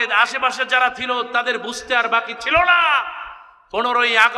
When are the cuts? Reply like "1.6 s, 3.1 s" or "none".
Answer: none